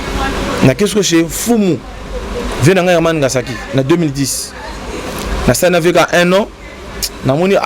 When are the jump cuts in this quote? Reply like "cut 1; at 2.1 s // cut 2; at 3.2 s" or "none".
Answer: none